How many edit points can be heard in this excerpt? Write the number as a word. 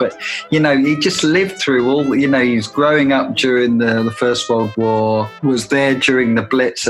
one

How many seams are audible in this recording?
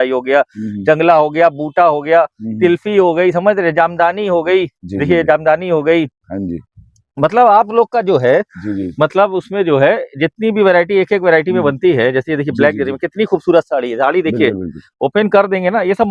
zero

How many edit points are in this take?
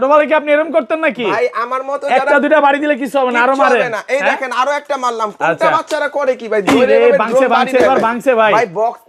zero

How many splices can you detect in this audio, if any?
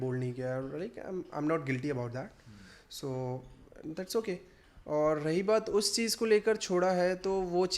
zero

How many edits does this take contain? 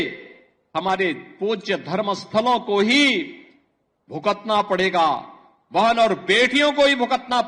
zero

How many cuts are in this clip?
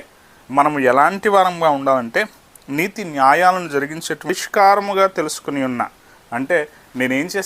one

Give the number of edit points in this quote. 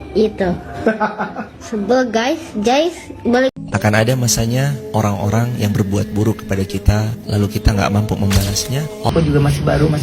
two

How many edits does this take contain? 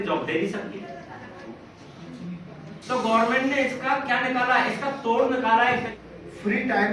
one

